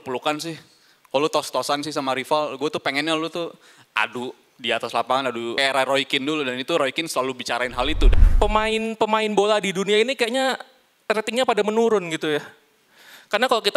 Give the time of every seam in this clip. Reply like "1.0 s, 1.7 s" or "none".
5.6 s, 8.0 s

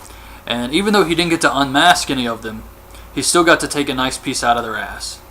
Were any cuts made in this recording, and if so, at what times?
1.8 s

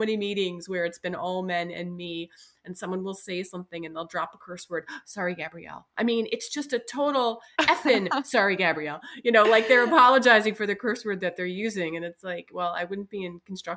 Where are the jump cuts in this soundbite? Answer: none

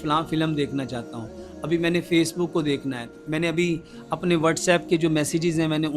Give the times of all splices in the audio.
none

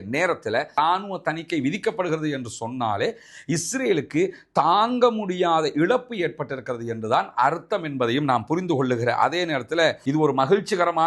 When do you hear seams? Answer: 0.7 s, 10.0 s

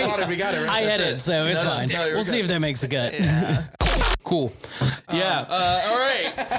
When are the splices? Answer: 3.9 s

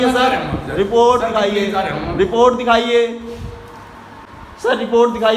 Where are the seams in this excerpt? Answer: none

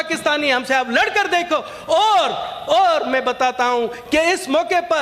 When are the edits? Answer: none

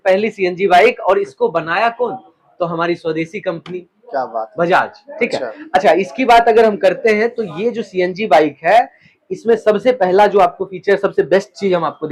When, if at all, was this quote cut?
none

